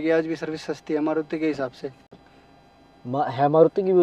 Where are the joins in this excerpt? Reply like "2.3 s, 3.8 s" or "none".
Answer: none